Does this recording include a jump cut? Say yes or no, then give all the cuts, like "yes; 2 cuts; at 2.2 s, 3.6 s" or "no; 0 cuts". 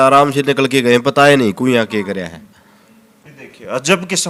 no; 0 cuts